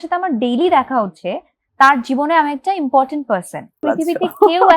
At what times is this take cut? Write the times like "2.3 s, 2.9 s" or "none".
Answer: 3.8 s